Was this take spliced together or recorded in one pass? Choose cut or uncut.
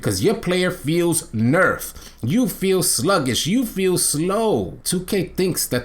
cut